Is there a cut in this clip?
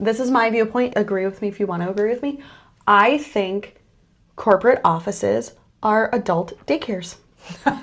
yes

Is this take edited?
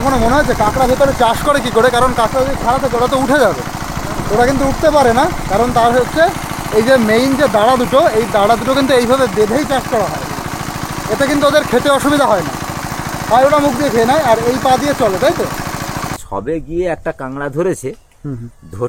yes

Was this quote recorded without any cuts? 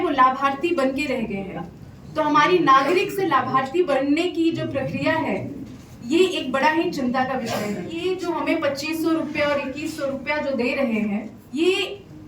no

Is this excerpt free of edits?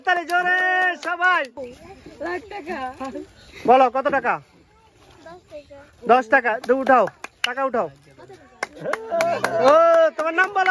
no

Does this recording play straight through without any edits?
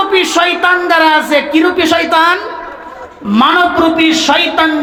yes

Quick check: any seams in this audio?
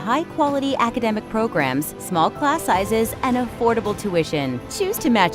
no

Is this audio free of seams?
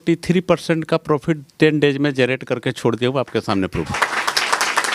no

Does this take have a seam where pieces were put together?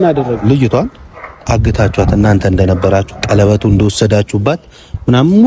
no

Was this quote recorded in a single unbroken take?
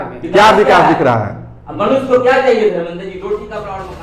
yes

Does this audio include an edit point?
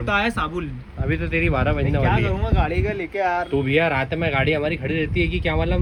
no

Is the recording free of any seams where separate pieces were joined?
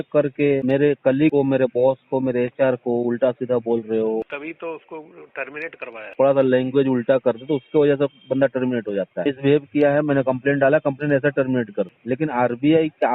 no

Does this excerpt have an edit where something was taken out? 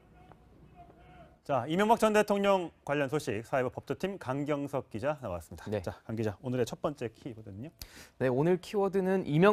no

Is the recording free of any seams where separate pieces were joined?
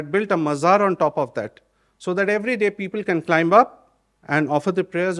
yes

